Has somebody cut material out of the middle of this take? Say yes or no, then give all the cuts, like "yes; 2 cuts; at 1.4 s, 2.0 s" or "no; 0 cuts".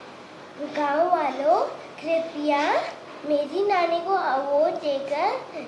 no; 0 cuts